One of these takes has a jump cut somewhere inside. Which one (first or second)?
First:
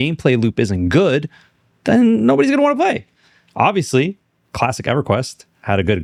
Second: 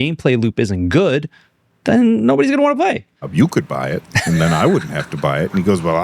second